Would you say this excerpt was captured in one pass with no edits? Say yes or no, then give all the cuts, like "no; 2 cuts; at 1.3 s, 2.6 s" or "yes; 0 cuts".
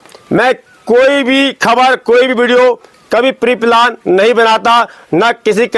yes; 0 cuts